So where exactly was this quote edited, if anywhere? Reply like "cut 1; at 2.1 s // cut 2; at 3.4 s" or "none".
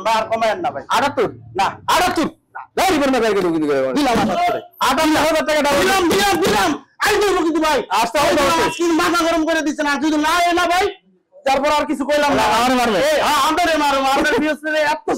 none